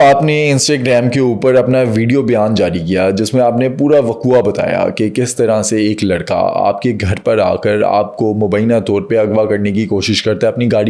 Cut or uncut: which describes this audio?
uncut